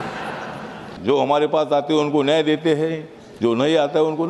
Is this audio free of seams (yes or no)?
no